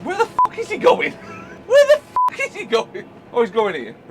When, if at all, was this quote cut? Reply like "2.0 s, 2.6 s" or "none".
none